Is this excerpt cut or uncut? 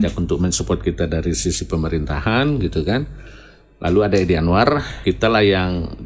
cut